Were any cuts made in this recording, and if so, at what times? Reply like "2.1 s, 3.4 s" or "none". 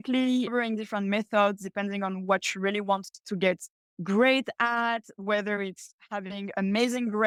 none